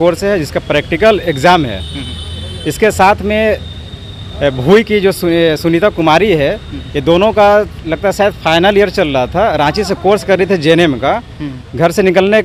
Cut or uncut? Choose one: uncut